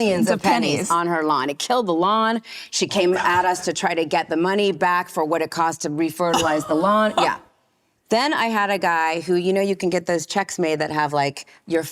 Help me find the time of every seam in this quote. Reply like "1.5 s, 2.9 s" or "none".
none